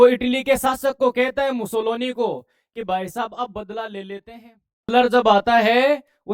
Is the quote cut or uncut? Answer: cut